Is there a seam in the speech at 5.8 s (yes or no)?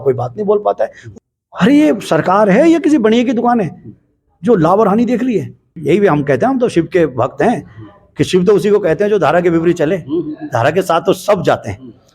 yes